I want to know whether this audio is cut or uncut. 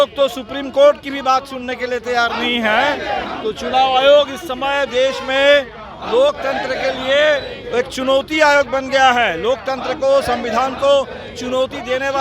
uncut